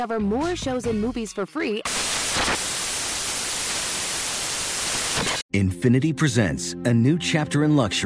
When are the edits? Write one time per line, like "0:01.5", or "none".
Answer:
0:05.4